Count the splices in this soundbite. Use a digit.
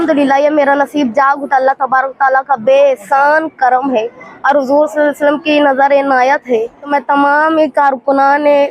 1